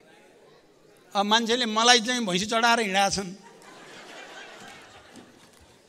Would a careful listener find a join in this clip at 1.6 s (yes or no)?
no